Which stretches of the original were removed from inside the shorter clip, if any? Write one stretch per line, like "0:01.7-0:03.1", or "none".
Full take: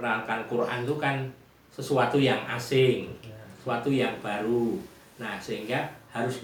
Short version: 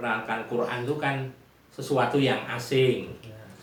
none